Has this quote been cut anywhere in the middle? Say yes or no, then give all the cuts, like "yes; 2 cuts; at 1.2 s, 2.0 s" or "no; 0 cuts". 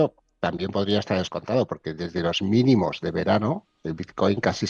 no; 0 cuts